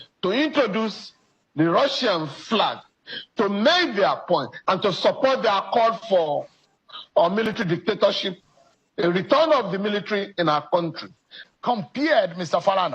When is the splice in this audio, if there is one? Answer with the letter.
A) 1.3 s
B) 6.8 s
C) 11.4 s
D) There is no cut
C